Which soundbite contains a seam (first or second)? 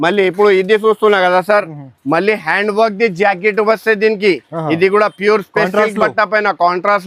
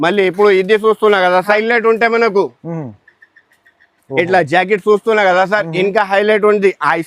second